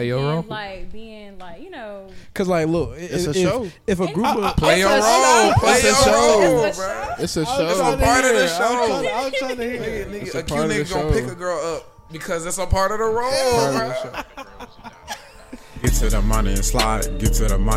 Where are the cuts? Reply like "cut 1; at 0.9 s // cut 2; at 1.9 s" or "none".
cut 1; at 15.8 s